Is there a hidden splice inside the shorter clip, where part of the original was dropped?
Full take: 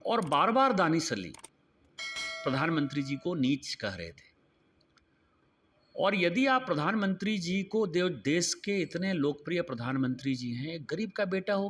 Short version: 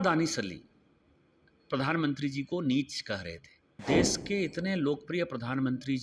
yes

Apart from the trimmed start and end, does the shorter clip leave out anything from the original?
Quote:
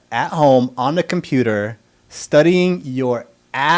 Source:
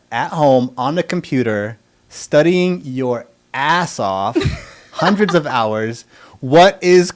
no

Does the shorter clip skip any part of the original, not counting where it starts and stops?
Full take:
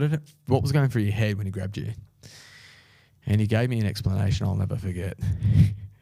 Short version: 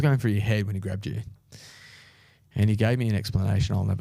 no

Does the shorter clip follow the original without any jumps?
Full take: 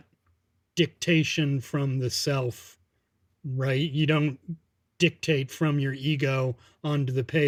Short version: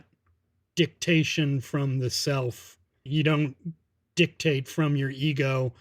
no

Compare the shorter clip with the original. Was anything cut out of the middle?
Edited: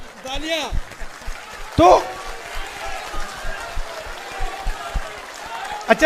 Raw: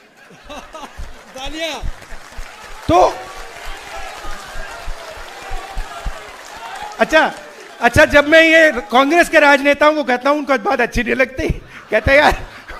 no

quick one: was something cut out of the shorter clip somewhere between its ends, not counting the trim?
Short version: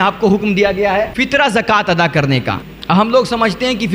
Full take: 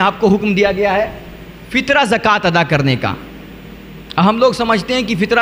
yes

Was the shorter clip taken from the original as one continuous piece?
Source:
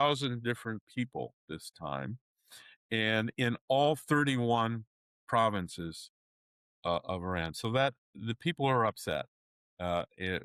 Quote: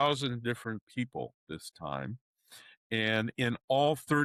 yes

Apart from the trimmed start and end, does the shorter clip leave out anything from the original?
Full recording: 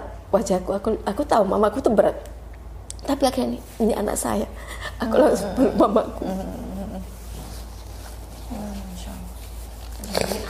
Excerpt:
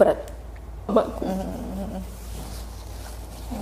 yes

